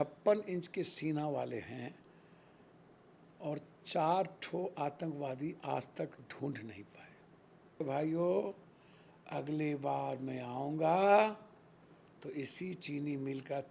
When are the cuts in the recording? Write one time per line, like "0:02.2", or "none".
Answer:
0:07.8